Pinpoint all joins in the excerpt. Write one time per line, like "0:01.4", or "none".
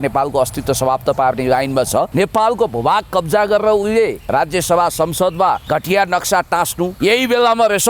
0:02.1
0:04.2
0:05.6
0:06.9